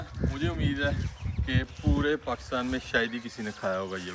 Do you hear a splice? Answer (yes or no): no